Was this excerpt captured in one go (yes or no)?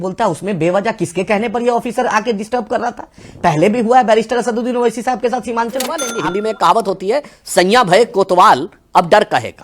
no